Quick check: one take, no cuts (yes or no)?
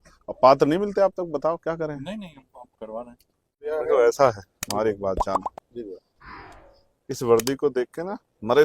no